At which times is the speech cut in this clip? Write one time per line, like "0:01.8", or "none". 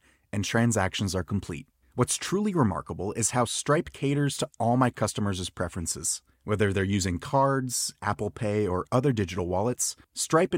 none

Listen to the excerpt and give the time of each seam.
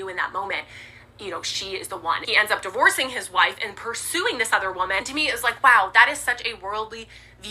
0:02.2
0:05.1

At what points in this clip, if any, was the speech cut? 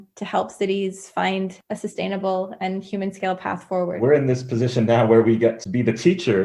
0:01.6
0:03.9
0:05.6

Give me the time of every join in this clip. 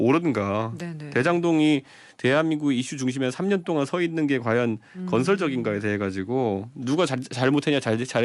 none

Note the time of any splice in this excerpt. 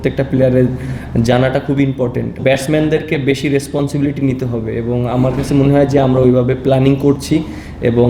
0:02.4

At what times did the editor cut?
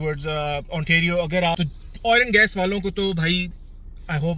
0:01.5

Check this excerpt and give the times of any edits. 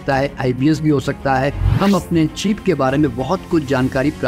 0:01.6

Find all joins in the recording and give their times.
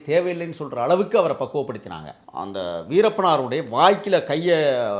0:02.2

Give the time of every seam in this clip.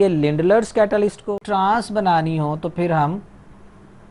0:01.4

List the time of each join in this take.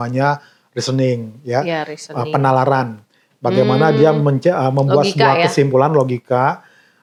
none

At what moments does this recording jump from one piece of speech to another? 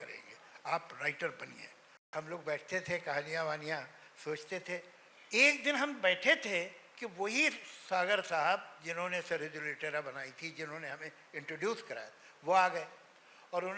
0:02.1

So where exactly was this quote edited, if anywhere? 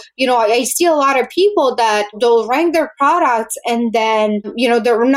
0:02.2

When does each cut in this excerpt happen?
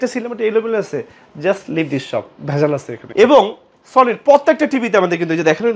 0:03.0

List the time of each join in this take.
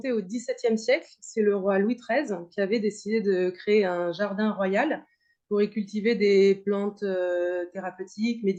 none

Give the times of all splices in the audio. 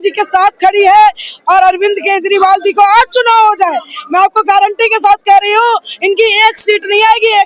none

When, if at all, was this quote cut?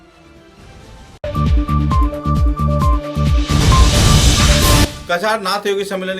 0:04.9

